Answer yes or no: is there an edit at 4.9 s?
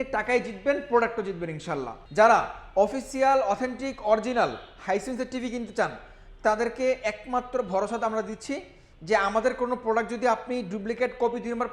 no